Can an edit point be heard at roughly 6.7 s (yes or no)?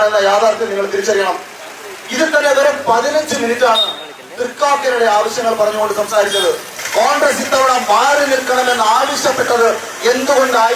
yes